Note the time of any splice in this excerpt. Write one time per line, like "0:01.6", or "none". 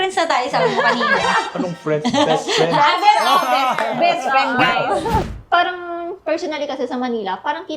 0:05.3